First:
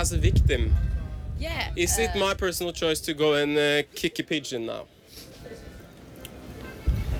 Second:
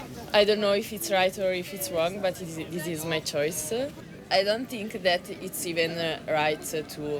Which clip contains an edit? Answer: second; 1 cut; at 4.0 s

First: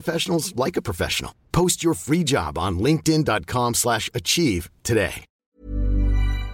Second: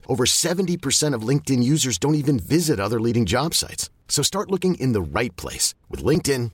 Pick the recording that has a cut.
first; 1 cut; at 5.3 s

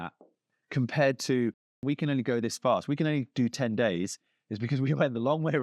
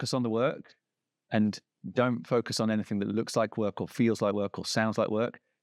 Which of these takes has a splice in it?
first; 1 cut; at 1.8 s

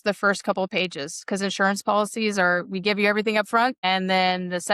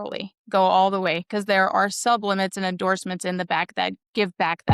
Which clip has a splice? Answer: first; 1 cut; at 3.8 s

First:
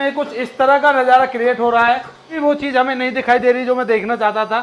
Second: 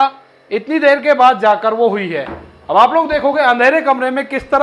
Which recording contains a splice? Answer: first; 1 cut; at 2.4 s

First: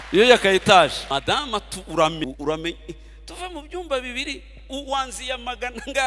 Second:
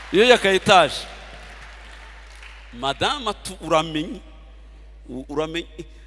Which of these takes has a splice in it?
first; 2 cuts; at 1.0 s, 2.2 s

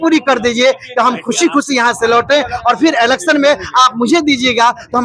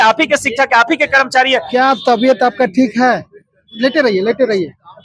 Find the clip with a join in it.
second; 1 cut; at 1.7 s

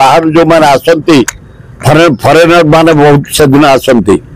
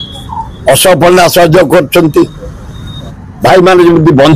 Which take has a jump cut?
second; 1 cut; at 3.1 s

